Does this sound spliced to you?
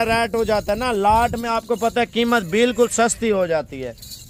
no; 0 cuts

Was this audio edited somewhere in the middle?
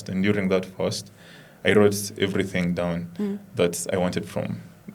no; 0 cuts

